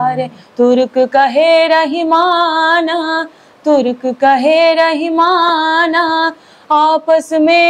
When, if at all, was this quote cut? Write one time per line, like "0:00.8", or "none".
none